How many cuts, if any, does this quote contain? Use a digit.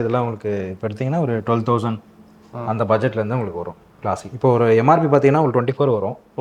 0